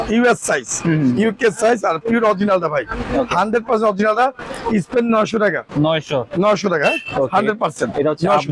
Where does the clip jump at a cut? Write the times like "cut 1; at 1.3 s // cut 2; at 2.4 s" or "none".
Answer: none